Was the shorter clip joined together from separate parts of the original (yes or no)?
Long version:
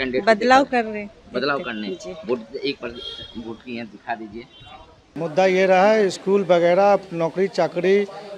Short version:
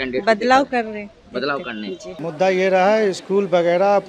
yes